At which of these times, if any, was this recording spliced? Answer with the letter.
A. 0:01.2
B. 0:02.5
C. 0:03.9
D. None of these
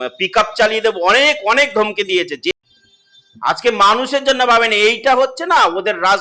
B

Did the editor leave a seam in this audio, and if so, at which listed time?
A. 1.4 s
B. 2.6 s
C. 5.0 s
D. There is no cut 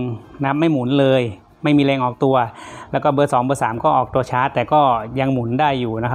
D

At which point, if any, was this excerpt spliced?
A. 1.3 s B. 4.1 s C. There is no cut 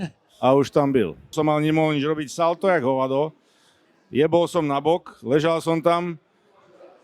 A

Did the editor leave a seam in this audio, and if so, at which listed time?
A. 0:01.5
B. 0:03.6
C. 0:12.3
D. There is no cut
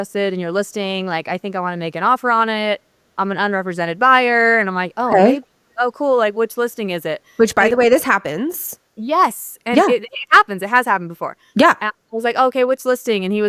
D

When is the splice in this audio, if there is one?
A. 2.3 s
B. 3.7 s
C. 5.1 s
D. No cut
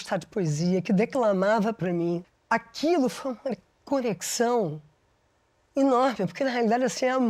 A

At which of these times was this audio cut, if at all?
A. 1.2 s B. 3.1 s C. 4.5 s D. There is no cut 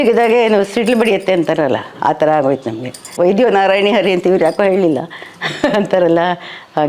B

